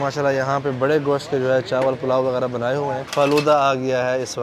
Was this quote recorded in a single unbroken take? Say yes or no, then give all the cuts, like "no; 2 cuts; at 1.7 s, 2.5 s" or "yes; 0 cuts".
no; 1 cut; at 3.1 s